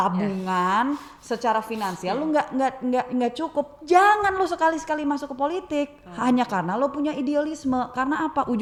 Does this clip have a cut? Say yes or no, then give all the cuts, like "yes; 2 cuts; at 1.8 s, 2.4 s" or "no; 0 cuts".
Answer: no; 0 cuts